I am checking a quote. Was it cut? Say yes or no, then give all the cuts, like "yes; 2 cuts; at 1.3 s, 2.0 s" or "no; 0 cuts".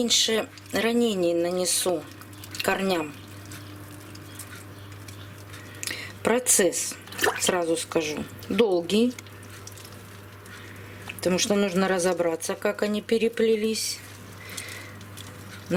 no; 0 cuts